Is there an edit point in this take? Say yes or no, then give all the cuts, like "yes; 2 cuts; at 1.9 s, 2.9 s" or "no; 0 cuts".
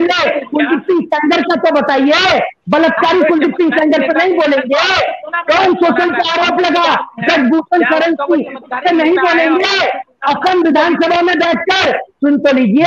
no; 0 cuts